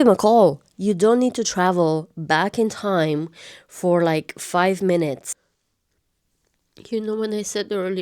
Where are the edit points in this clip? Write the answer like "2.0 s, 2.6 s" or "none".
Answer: 5.3 s

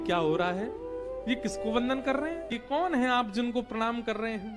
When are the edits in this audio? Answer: 2.6 s

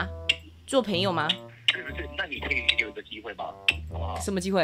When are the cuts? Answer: 1.5 s

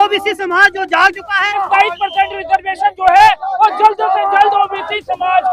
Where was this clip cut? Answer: 1.6 s

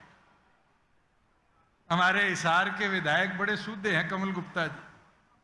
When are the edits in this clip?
1.1 s

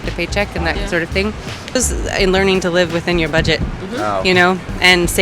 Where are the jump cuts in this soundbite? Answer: 1.7 s

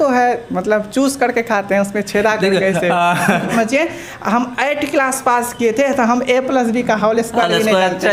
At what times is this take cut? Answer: 3.5 s

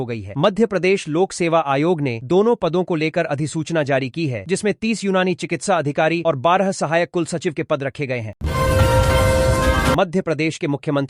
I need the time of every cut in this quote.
8.4 s, 9.8 s

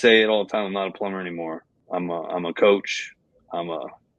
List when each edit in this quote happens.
1.7 s

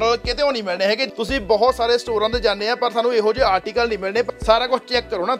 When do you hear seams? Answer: 1.1 s, 4.3 s

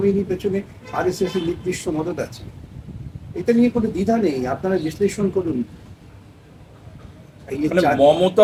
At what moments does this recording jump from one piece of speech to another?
none

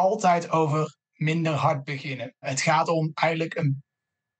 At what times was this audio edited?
2.5 s

